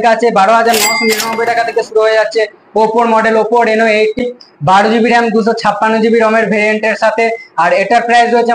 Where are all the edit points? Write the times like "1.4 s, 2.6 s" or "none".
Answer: 4.2 s